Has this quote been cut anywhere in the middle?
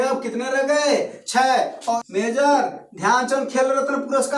yes; 1 cut; at 2.0 s

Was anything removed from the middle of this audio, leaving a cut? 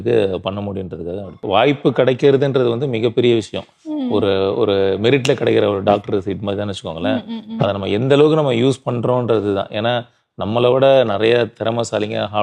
yes; 1 cut; at 1.4 s

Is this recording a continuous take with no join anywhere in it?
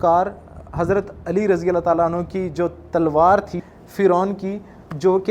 no; 1 cut; at 3.5 s

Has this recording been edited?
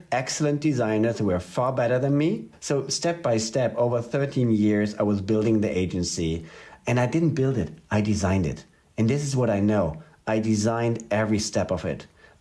yes; 1 cut; at 2.5 s

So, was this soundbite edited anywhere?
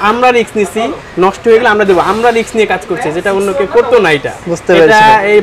no; 0 cuts

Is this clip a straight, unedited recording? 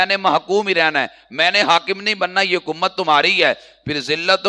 yes; 0 cuts

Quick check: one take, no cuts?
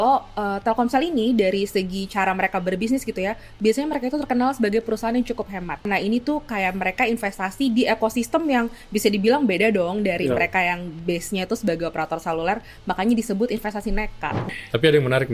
no; 2 cuts; at 5.9 s, 14.4 s

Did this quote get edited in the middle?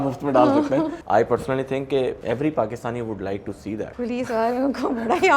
yes; 3 cuts; at 1.0 s, 2.2 s, 3.9 s

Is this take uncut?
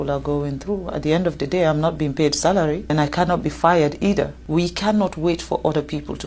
no; 2 cuts; at 2.9 s, 4.4 s

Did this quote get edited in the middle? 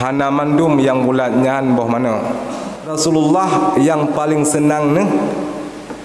yes; 1 cut; at 2.9 s

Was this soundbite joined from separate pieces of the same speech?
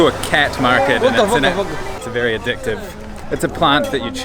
yes; 1 cut; at 2.0 s

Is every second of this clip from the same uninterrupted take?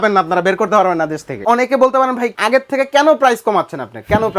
no; 2 cuts; at 1.4 s, 2.3 s

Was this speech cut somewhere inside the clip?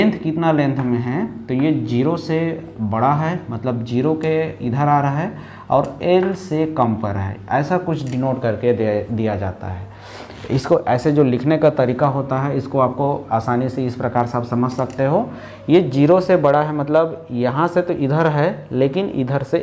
no; 0 cuts

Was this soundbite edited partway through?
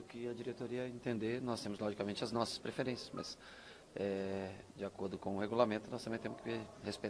no; 0 cuts

